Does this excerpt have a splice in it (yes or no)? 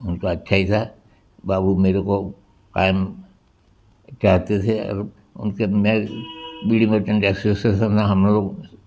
no